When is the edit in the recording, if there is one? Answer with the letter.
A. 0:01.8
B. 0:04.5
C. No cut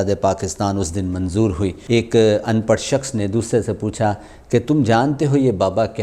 A